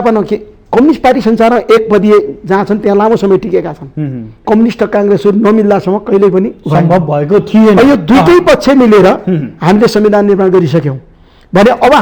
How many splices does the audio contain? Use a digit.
1